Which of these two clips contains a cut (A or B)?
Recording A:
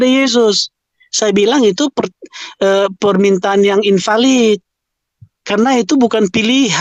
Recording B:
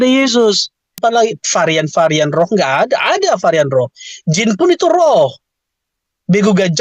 B